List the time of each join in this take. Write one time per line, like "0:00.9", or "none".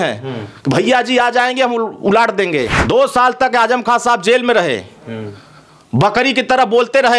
0:02.8